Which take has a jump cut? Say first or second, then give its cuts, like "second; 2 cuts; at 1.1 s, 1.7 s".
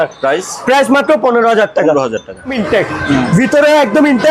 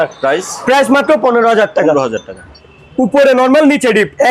first; 1 cut; at 2.6 s